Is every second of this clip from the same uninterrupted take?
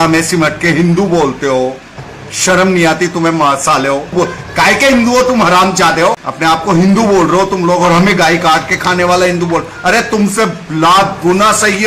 no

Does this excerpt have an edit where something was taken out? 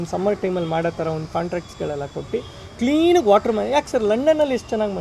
no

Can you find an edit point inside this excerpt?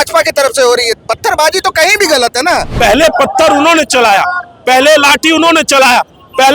yes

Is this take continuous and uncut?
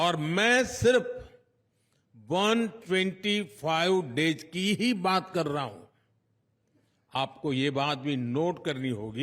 yes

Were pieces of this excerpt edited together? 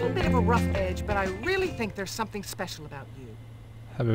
no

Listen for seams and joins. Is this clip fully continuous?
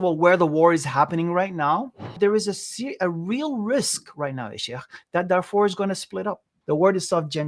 no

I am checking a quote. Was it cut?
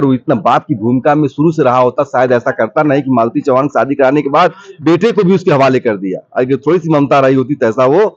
no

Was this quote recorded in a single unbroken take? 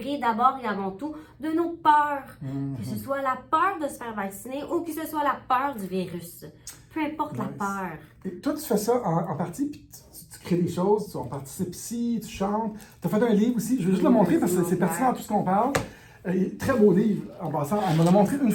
yes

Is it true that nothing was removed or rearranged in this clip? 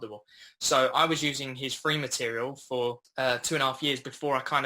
no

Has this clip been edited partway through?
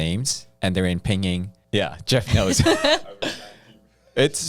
yes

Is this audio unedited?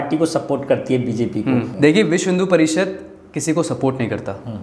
no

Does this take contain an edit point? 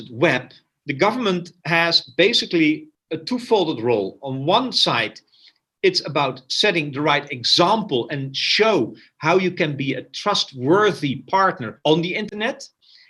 no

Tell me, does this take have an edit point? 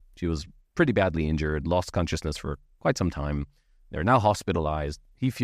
no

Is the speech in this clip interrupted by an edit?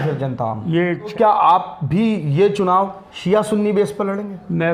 yes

